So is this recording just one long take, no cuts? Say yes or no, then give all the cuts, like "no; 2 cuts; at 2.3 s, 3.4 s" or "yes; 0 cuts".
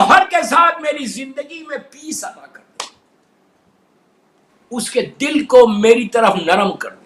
yes; 0 cuts